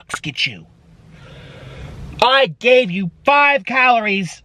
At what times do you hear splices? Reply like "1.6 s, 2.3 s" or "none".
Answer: none